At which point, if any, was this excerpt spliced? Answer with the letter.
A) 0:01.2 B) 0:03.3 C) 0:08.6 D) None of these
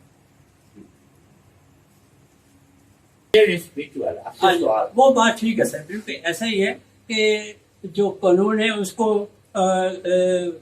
B